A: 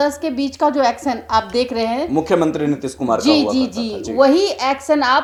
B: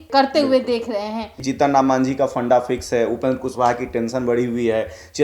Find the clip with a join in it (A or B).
B